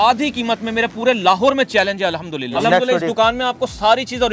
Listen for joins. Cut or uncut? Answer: cut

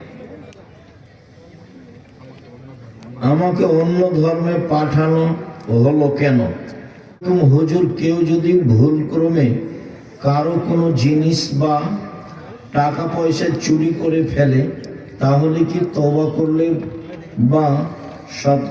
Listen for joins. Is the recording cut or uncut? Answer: cut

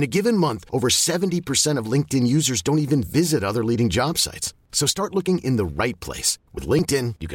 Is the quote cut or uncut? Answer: uncut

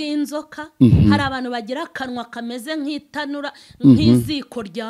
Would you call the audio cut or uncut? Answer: uncut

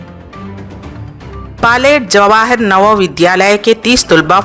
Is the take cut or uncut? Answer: uncut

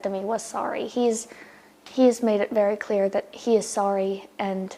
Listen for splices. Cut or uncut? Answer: uncut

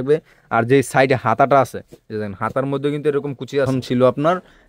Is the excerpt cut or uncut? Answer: cut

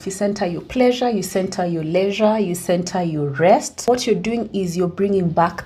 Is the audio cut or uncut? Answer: cut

